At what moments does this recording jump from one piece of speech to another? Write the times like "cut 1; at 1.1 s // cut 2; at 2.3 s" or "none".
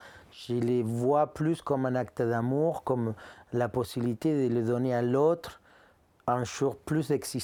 none